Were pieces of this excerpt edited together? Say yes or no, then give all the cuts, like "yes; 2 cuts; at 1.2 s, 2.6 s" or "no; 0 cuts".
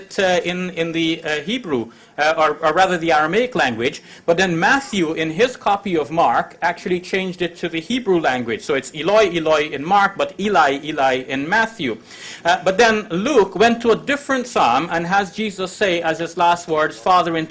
no; 0 cuts